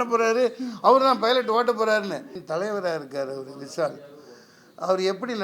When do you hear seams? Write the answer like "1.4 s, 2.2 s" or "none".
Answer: 2.4 s